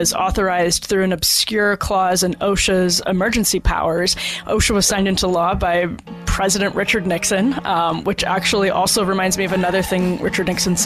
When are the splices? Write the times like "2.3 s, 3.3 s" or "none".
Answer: none